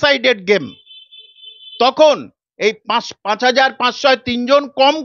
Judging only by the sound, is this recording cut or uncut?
uncut